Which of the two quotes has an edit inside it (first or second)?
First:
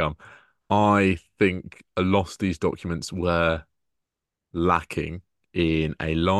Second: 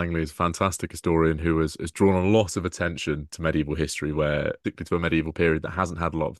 second